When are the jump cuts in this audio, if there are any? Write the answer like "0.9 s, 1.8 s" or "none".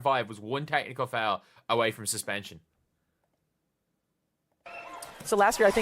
none